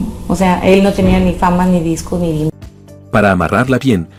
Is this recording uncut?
yes; 0 cuts

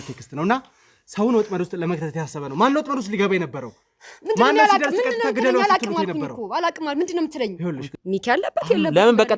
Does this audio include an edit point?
yes; 1 cut; at 7.9 s

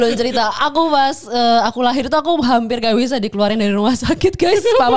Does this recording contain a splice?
no; 0 cuts

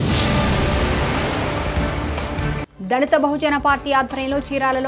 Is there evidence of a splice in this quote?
no; 0 cuts

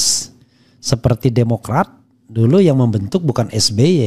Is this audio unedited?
yes; 0 cuts

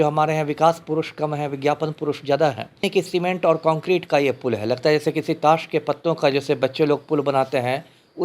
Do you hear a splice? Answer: yes; 1 cut; at 2.9 s

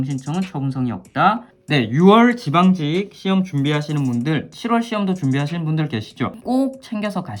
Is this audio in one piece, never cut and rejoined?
no; 2 cuts; at 1.5 s, 6.4 s

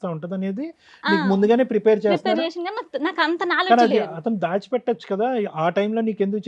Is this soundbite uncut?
yes; 0 cuts

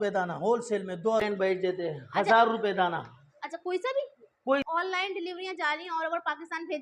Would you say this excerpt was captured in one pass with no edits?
no; 2 cuts; at 1.2 s, 4.7 s

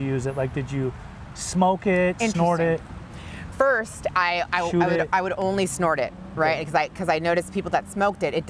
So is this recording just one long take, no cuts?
yes; 0 cuts

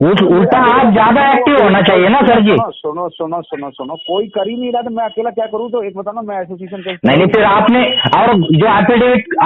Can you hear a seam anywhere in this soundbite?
no; 0 cuts

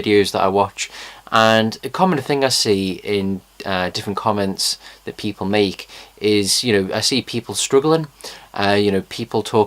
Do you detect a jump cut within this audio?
no; 0 cuts

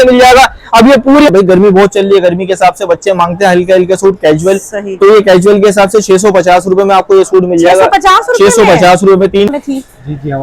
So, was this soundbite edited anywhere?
yes; 2 cuts; at 1.3 s, 9.5 s

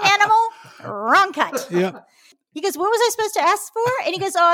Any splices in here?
yes; 1 cut; at 2.4 s

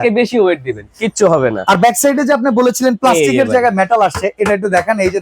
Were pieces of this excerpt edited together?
no; 0 cuts

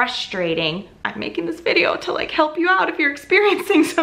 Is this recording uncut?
no; 1 cut; at 1.0 s

